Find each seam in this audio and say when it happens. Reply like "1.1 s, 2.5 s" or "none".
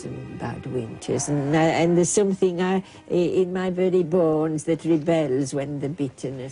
none